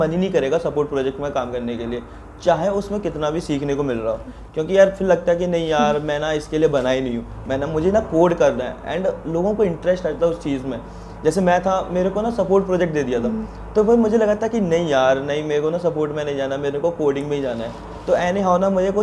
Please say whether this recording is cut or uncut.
uncut